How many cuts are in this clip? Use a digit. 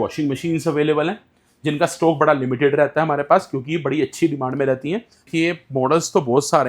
1